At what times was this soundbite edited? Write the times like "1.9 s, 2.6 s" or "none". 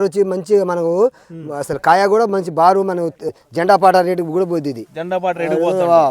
3.2 s